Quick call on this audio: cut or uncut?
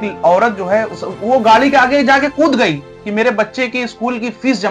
cut